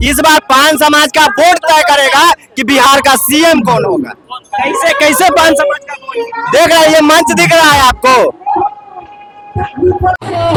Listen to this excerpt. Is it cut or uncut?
uncut